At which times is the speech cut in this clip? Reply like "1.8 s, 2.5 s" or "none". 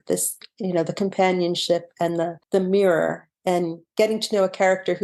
2.4 s, 3.8 s